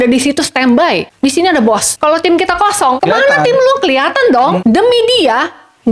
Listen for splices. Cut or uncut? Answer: cut